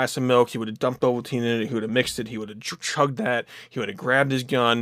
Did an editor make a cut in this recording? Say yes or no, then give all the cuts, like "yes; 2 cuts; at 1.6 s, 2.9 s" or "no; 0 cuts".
no; 0 cuts